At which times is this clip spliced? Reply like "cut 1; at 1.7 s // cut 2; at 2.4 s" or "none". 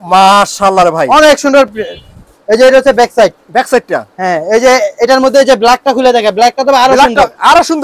none